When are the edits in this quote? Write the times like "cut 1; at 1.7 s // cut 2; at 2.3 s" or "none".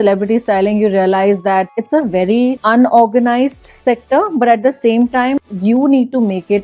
cut 1; at 1.7 s // cut 2; at 2.6 s // cut 3; at 5.3 s